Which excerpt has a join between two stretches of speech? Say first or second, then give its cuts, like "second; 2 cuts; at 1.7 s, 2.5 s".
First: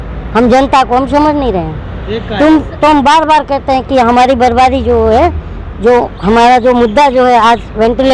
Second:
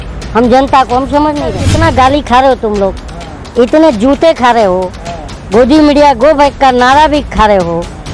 second; 1 cut; at 1.7 s